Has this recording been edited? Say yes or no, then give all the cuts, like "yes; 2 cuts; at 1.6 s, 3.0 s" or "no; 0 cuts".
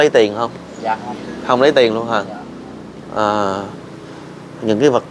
no; 0 cuts